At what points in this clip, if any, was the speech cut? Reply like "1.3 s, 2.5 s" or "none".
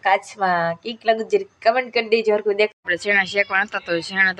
2.7 s